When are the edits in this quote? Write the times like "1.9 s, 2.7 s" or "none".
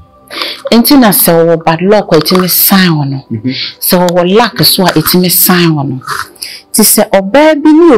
none